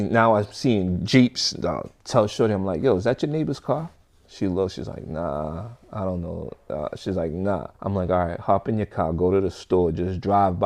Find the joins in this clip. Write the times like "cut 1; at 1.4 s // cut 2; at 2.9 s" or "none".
none